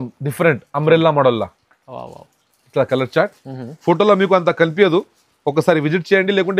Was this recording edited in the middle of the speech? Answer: no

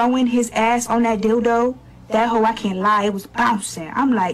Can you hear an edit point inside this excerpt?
yes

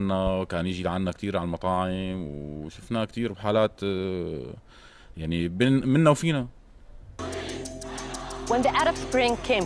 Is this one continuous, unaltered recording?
no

